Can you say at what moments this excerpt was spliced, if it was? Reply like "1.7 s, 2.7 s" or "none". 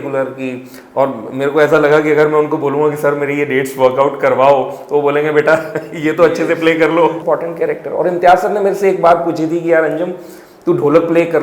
7.2 s